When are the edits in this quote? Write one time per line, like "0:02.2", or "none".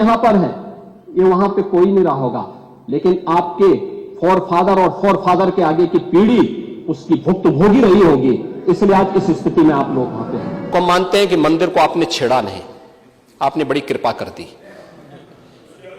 0:10.7